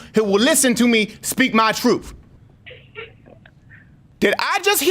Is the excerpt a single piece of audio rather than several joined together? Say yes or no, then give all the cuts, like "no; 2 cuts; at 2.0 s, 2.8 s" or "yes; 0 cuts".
no; 2 cuts; at 2.3 s, 4.0 s